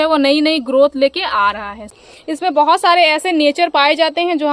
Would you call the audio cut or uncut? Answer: cut